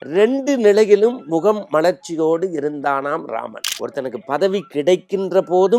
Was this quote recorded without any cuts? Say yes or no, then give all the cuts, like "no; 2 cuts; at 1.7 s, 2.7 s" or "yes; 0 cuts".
no; 1 cut; at 3.6 s